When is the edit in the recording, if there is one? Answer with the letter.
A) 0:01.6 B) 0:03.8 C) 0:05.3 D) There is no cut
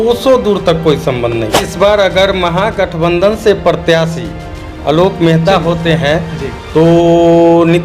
A